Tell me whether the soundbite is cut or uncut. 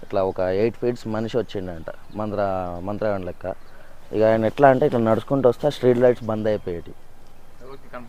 uncut